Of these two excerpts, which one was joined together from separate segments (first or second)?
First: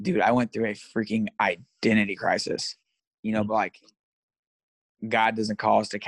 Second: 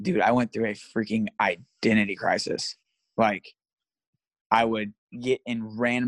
first